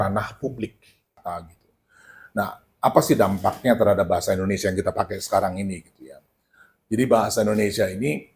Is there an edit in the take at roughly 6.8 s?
no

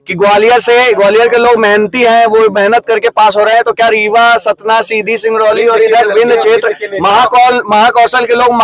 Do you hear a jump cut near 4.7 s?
no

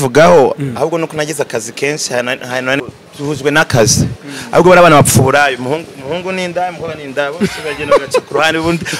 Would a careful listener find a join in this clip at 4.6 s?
no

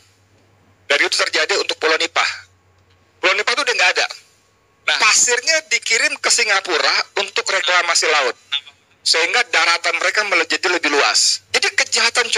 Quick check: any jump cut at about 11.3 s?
yes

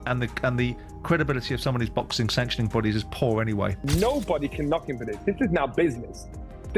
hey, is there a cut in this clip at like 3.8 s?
yes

